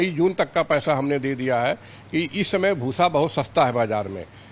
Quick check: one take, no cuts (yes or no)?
yes